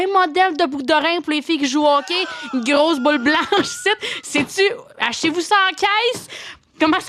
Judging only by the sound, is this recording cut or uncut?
uncut